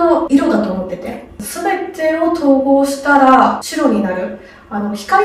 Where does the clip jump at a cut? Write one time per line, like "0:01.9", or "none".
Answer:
none